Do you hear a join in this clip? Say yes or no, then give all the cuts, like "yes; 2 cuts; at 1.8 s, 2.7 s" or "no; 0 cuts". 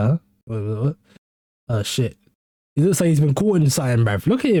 no; 0 cuts